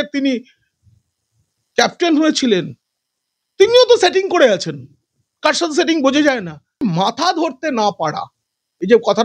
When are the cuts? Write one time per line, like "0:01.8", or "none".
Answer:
0:06.8